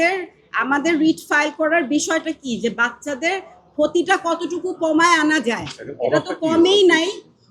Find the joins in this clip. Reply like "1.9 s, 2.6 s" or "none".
none

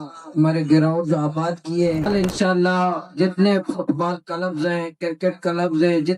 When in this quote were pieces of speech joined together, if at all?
2.1 s

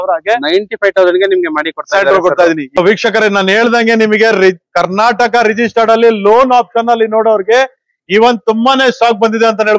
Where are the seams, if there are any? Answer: 2.8 s

